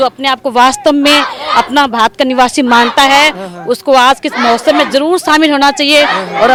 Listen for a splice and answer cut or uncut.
uncut